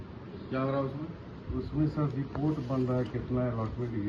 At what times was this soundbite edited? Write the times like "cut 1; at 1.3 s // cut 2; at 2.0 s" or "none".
none